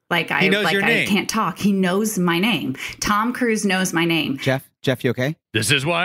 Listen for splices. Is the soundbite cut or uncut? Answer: cut